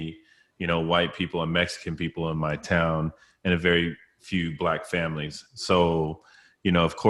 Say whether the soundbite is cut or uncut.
uncut